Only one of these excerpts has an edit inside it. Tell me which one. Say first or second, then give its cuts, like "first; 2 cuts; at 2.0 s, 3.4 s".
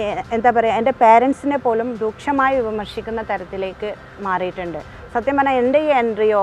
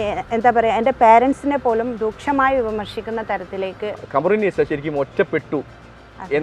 second; 1 cut; at 4.0 s